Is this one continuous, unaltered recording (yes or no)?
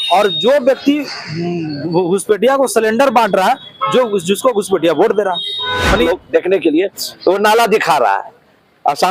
no